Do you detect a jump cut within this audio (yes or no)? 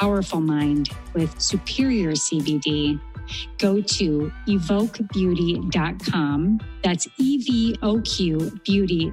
no